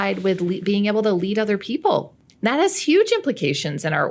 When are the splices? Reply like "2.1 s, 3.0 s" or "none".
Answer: 2.1 s